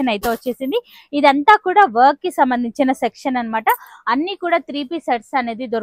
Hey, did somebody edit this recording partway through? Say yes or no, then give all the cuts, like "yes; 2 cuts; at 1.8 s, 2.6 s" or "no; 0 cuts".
no; 0 cuts